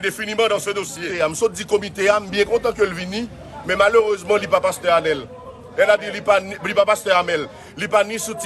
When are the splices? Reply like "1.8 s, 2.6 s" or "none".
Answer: 1.0 s